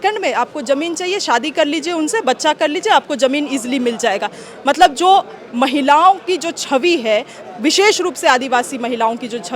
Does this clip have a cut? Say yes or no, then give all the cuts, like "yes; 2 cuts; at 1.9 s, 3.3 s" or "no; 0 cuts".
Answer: no; 0 cuts